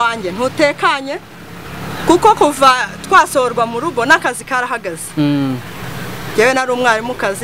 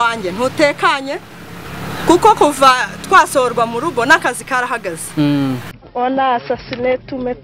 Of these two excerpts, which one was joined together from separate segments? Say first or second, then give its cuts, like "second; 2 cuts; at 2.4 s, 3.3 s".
second; 1 cut; at 5.8 s